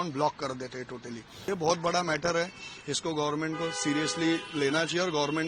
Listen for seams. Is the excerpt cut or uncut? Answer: cut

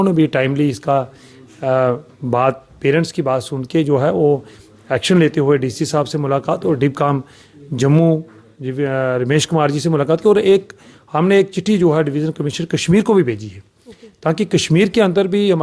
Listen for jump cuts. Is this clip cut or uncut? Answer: uncut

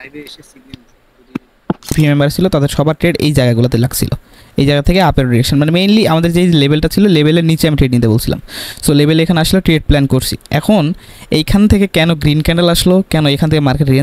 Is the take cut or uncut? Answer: cut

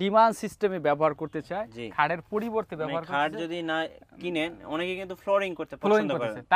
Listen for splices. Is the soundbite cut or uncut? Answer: uncut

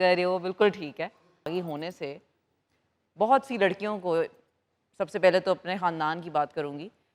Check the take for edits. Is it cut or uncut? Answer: cut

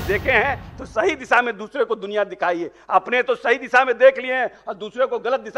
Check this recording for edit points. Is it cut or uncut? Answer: uncut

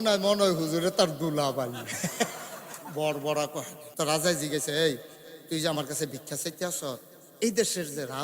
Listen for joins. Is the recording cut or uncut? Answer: cut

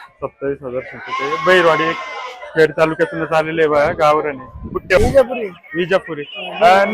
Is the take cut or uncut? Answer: cut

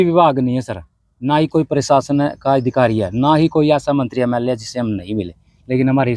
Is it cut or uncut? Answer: uncut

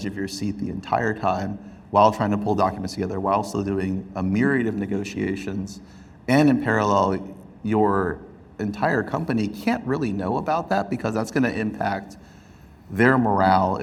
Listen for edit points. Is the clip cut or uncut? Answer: uncut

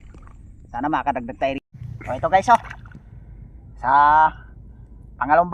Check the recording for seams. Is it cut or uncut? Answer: cut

